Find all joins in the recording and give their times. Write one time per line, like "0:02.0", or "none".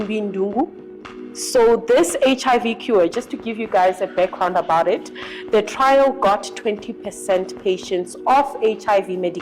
none